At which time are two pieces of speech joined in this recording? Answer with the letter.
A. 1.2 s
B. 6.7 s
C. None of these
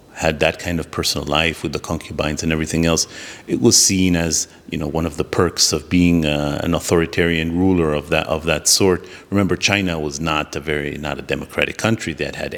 C